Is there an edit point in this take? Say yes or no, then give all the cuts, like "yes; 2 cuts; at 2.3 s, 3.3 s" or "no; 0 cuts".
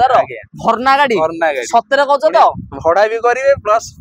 no; 0 cuts